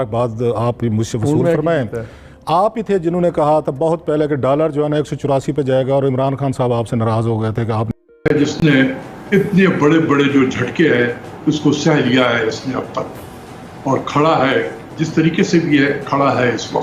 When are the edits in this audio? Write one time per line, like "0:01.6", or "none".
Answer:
0:08.0